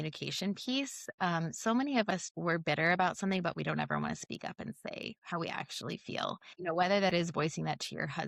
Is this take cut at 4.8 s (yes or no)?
no